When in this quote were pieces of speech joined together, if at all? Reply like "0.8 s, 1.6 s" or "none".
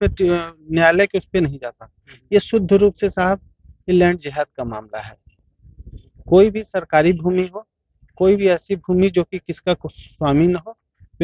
none